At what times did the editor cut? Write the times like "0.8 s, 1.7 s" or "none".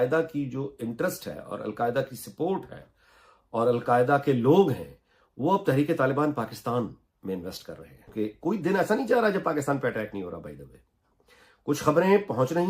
8.1 s